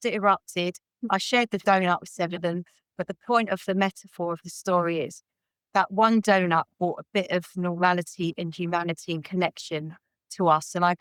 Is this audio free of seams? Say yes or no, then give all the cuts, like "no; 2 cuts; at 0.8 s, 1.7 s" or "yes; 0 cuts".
yes; 0 cuts